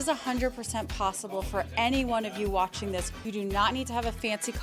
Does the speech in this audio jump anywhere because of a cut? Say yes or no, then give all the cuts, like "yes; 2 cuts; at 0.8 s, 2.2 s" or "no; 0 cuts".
yes; 1 cut; at 3.2 s